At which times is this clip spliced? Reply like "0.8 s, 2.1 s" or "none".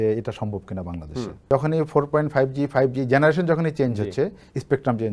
1.5 s